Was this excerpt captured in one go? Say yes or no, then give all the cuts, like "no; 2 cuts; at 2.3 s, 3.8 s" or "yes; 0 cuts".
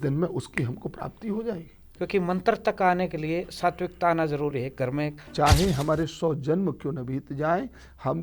no; 2 cuts; at 1.8 s, 5.2 s